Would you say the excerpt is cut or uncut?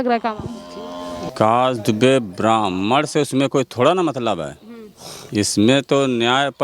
cut